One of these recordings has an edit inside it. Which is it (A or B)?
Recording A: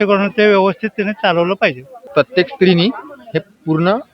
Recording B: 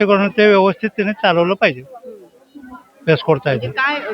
A